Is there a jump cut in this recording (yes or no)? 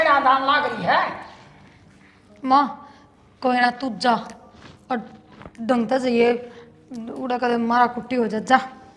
no